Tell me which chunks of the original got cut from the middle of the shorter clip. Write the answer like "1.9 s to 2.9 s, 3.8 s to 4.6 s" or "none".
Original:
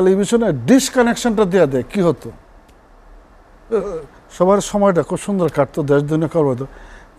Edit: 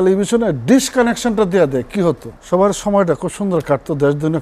2.3 s to 4.2 s